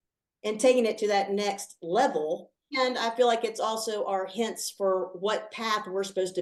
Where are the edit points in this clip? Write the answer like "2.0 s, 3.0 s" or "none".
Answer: none